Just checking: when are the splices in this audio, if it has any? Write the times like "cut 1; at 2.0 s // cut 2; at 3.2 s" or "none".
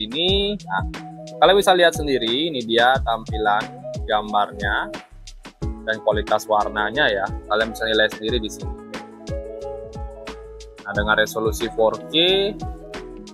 cut 1; at 8.5 s // cut 2; at 10.8 s